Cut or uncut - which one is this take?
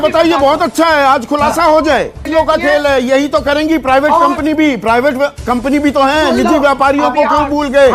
cut